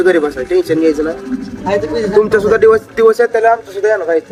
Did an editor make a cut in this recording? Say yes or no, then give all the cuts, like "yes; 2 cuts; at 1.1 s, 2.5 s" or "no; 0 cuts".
no; 0 cuts